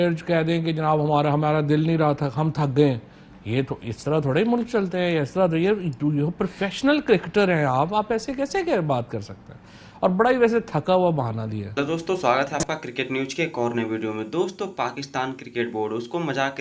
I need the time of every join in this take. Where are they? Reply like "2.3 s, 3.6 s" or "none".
none